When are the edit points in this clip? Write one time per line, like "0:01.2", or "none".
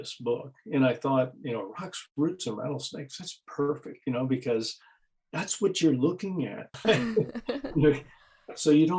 0:06.7